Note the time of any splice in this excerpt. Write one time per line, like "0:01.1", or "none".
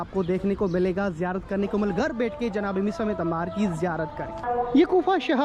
0:04.4